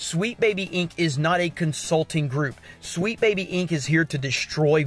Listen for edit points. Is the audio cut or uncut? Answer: uncut